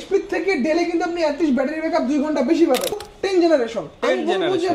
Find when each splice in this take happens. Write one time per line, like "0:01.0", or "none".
0:03.0

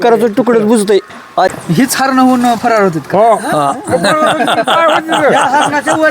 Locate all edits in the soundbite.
0:01.2

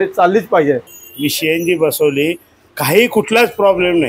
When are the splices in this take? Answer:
0:01.0

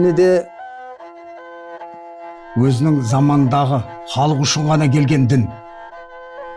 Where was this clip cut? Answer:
0:05.6

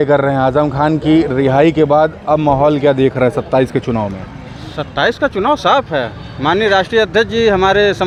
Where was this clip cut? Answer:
none

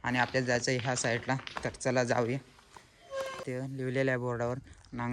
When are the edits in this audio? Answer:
0:03.4

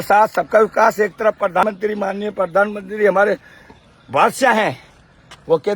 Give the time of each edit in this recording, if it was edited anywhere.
0:01.6

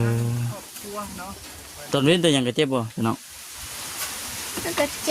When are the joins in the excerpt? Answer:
0:01.9

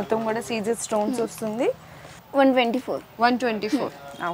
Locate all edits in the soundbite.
none

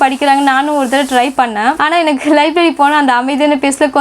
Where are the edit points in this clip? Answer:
none

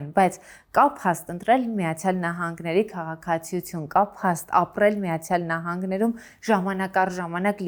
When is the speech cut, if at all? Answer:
none

